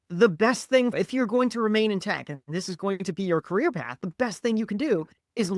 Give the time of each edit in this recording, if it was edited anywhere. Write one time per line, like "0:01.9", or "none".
0:00.9

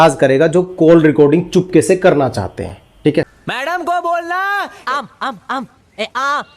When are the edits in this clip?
none

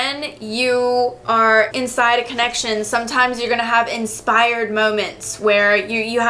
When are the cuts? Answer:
0:01.7

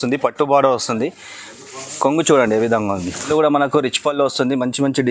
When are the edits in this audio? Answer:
0:03.3

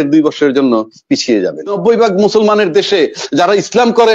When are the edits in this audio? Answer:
0:01.8

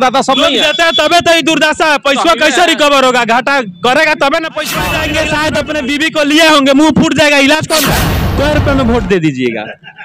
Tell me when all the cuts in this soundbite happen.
0:04.9
0:07.9

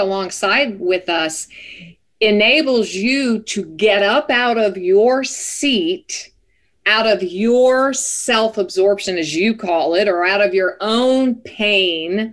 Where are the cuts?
none

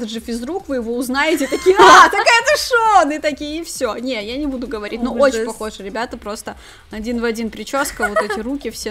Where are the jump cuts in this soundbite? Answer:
none

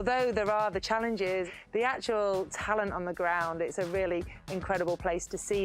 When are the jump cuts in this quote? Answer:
0:01.5

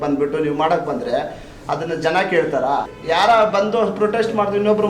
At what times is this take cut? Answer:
0:02.9

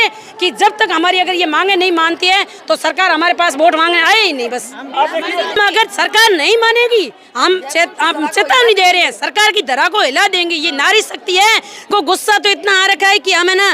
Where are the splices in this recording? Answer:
0:05.6
0:11.9

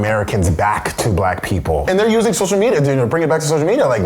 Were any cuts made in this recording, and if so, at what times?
0:01.8

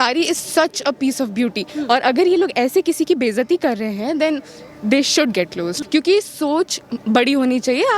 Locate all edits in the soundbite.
0:05.8

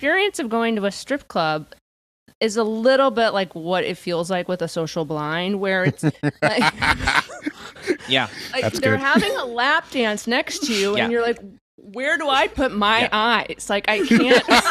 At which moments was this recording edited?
none

